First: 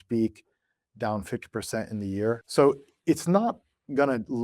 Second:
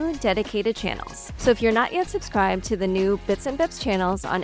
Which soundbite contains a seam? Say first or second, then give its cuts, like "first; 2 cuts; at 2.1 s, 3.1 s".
first; 1 cut; at 2.4 s